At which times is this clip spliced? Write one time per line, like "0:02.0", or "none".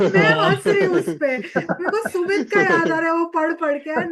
none